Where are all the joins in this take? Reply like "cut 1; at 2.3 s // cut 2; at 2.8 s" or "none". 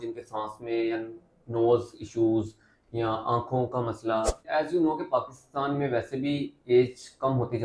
cut 1; at 4.4 s